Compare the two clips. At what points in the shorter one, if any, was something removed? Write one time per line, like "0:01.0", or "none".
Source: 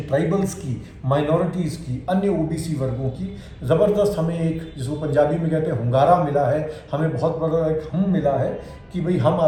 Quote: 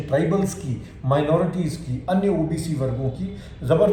none